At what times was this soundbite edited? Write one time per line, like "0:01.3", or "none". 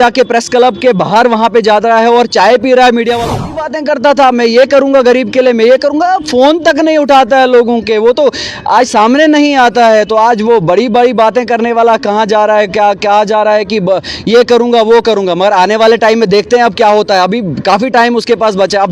0:03.5